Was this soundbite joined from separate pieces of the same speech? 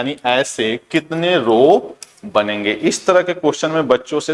no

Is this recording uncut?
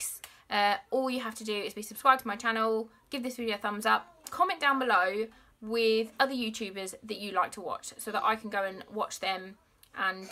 no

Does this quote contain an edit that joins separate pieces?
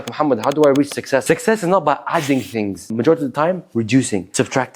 yes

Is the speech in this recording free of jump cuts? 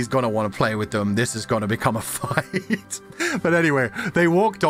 yes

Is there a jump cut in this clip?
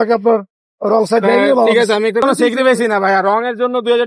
yes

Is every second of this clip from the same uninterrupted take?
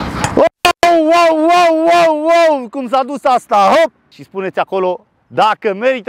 no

